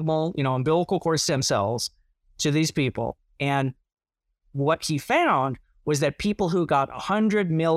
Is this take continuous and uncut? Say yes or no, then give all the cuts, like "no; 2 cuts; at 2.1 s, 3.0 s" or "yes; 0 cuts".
yes; 0 cuts